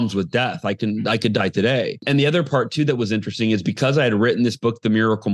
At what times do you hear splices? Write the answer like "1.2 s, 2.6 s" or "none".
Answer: 2.0 s